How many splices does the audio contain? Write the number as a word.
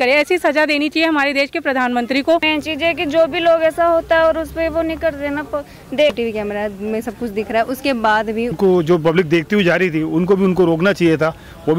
three